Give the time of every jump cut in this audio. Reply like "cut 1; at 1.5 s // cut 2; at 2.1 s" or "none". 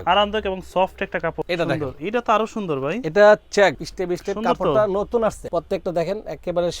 cut 1; at 1.4 s // cut 2; at 3.9 s // cut 3; at 5.4 s